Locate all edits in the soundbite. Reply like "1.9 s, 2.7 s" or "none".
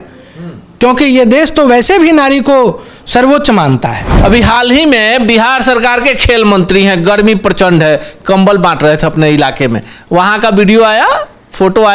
4.1 s